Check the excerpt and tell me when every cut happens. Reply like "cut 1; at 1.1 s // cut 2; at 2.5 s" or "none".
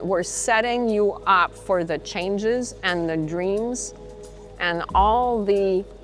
none

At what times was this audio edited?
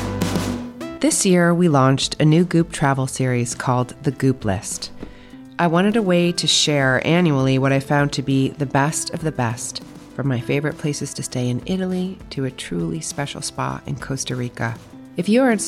cut 1; at 0.9 s

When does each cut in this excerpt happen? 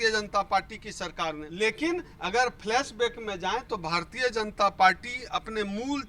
cut 1; at 1.5 s

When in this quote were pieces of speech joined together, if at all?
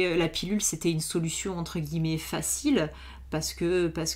none

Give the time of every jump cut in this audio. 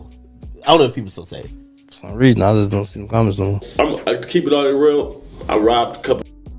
cut 1; at 2.1 s // cut 2; at 3.7 s

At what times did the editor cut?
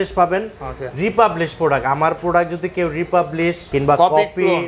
cut 1; at 3.7 s

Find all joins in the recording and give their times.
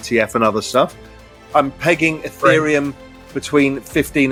none

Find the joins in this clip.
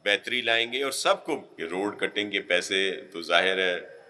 cut 1; at 1.5 s

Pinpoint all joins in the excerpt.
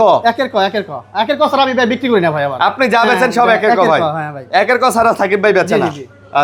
none

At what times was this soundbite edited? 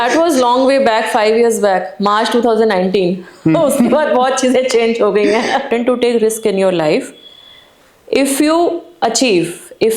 cut 1; at 5.7 s

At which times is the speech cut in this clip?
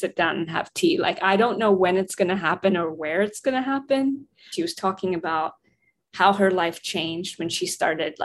cut 1; at 4.4 s

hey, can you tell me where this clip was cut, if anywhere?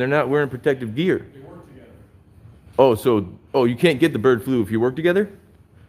none

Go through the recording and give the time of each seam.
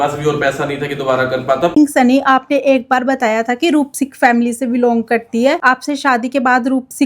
cut 1; at 1.7 s

